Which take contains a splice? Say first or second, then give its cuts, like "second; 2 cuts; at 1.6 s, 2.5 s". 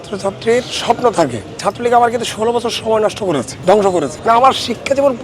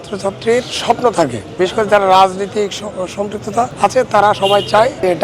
first; 1 cut; at 1.4 s